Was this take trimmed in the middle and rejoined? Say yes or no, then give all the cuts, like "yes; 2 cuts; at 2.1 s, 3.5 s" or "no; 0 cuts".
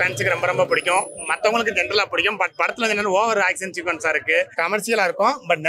yes; 1 cut; at 4.5 s